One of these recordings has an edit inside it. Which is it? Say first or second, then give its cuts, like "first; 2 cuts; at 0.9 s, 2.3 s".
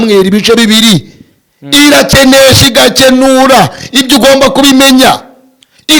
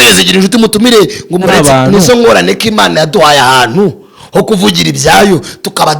second; 1 cut; at 1.5 s